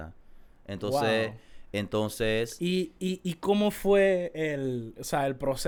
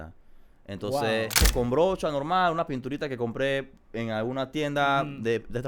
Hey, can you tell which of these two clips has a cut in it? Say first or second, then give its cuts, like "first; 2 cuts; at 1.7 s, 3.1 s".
second; 1 cut; at 1.5 s